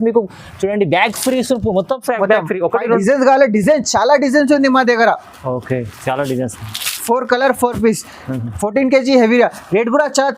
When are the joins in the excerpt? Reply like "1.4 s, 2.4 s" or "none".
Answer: 2.9 s